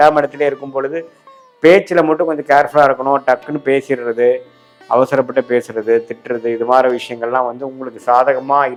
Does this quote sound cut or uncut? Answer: uncut